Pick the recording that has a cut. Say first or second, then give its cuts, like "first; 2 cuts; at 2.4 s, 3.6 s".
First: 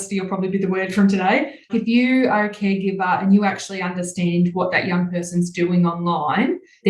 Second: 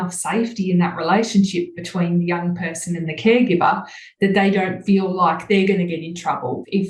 first; 1 cut; at 1.7 s